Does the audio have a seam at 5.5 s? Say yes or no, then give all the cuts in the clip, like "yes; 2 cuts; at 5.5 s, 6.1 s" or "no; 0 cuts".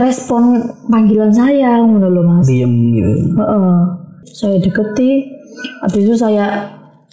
no; 1 cut; at 4.2 s